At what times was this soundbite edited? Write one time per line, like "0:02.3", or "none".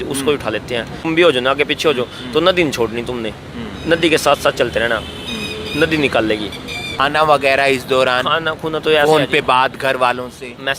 0:01.1
0:06.8